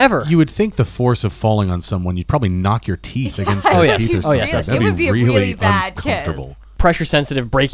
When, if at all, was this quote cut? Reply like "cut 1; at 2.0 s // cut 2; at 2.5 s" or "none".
cut 1; at 6.6 s